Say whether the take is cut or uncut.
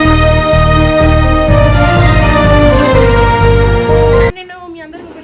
cut